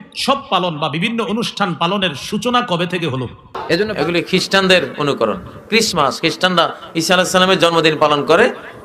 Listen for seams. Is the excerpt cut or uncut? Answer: cut